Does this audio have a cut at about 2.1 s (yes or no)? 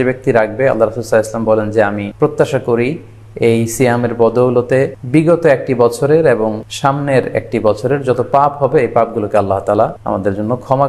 yes